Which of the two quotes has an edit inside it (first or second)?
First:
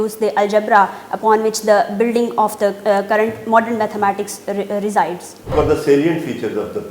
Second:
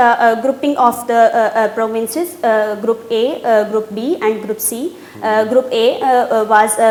first